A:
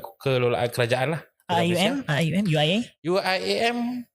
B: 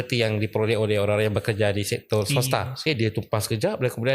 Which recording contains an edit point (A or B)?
B